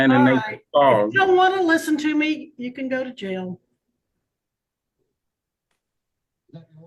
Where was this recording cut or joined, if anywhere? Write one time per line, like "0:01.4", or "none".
none